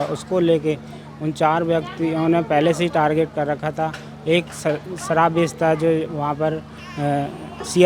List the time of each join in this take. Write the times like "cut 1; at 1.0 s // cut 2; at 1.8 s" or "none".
none